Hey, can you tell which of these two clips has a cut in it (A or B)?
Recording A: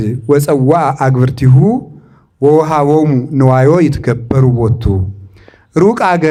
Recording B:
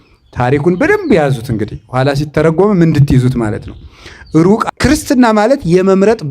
B